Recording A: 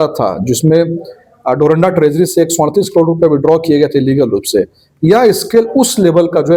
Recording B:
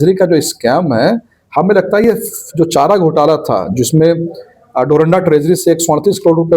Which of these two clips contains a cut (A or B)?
B